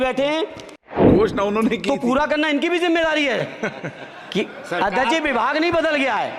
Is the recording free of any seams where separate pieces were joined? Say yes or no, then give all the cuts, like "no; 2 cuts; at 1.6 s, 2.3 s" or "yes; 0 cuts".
no; 1 cut; at 0.9 s